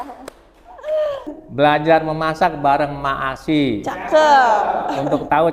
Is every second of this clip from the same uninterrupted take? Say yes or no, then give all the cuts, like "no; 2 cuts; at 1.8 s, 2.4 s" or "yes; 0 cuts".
no; 1 cut; at 1.3 s